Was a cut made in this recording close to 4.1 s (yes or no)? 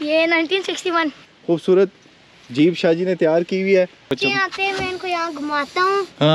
yes